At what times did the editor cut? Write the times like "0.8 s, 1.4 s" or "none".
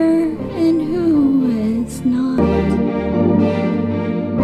2.3 s